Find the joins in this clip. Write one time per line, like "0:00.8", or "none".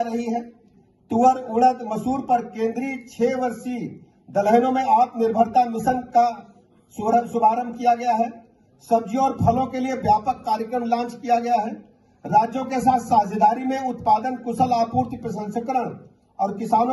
none